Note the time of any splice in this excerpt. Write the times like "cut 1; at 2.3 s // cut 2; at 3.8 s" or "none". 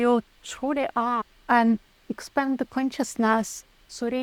cut 1; at 1.3 s